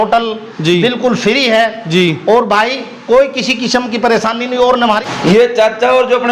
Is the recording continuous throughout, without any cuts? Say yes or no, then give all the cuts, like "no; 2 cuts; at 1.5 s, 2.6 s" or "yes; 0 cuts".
no; 1 cut; at 5.1 s